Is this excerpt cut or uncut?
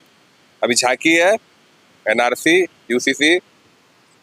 uncut